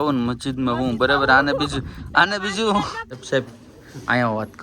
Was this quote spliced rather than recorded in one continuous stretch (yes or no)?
yes